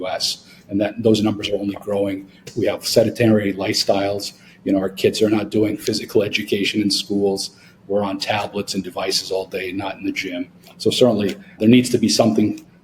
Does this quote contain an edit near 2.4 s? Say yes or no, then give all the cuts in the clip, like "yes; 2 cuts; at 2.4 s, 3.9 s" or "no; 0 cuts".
yes; 2 cuts; at 2.4 s, 11.5 s